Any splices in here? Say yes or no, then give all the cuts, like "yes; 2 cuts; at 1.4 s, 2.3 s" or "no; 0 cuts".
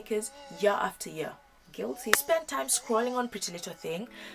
yes; 1 cut; at 2.2 s